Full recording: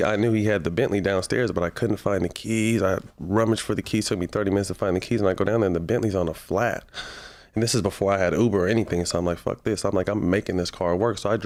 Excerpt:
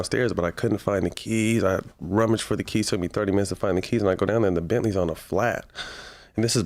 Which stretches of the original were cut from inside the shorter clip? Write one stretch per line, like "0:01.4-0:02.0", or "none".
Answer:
none